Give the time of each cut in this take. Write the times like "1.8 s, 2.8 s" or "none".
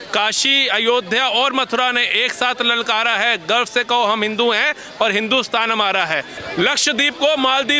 6.4 s